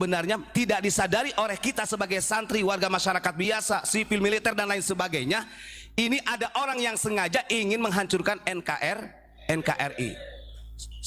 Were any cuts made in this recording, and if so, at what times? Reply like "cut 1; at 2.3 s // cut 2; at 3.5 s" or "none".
none